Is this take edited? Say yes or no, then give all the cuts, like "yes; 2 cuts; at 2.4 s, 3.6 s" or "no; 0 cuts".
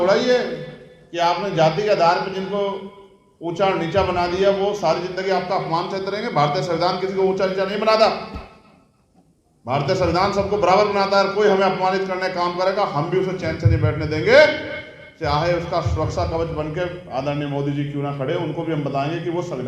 no; 0 cuts